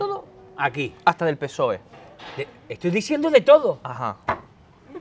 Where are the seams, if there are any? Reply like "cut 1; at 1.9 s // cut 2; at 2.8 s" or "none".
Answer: none

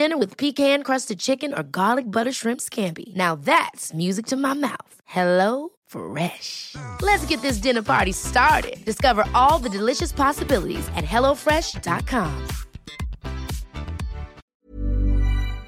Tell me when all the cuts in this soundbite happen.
cut 1; at 14.4 s

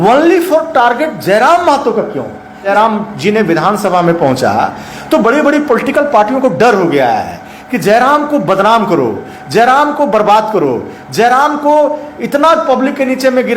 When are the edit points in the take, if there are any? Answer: cut 1; at 2.7 s

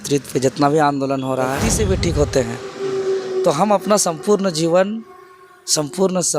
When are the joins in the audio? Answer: cut 1; at 1.6 s

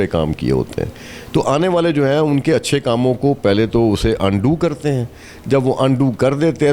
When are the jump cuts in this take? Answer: none

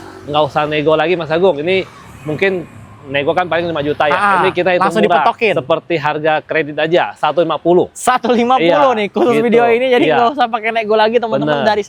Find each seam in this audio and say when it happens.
none

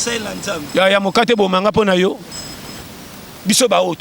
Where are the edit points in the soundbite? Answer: cut 1; at 2.7 s

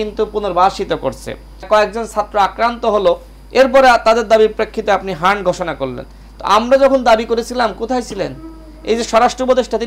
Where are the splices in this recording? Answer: cut 1; at 1.7 s

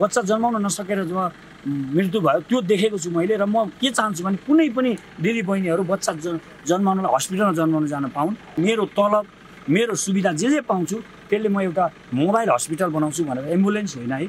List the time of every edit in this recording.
cut 1; at 8.6 s

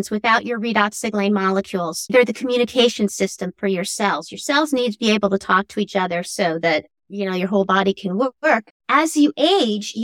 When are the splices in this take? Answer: cut 1; at 2.1 s // cut 2; at 8.7 s

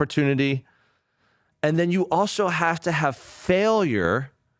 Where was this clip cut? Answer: none

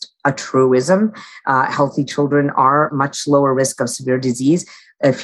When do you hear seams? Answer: cut 1; at 2.9 s

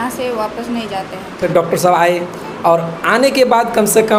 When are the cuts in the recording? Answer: cut 1; at 1.4 s

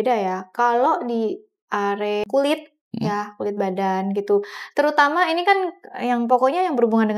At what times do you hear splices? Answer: cut 1; at 2.2 s

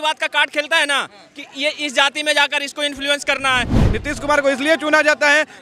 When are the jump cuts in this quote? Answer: cut 1; at 3.8 s

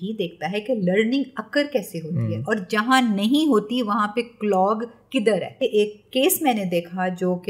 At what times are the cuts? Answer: cut 1; at 5.6 s

